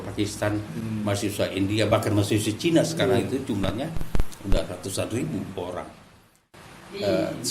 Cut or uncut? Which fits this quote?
cut